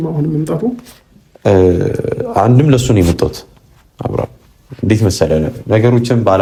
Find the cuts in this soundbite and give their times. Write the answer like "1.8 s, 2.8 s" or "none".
none